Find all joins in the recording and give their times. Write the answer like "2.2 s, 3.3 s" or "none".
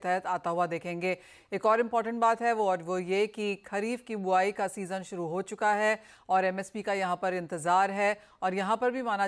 none